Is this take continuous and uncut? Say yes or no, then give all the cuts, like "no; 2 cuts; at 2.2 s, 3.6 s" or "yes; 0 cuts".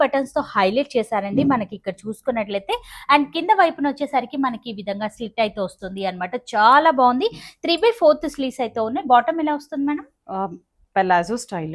yes; 0 cuts